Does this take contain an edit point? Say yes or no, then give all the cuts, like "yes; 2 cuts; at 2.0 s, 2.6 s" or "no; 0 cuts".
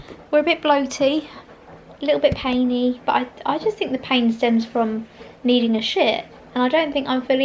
no; 0 cuts